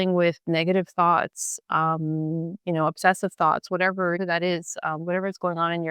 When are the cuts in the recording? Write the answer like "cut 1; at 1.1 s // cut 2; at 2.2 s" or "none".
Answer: cut 1; at 4.2 s